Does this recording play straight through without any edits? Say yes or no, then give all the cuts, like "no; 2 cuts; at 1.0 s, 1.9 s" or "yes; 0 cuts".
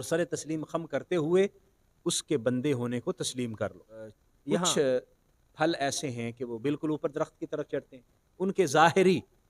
no; 1 cut; at 4.3 s